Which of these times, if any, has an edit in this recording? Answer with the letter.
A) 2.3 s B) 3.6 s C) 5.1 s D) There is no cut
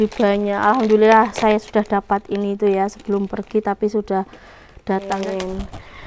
C